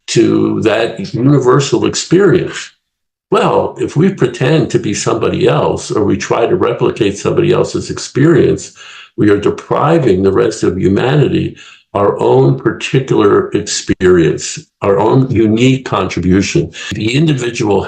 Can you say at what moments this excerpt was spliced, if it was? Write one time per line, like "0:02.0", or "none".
0:16.9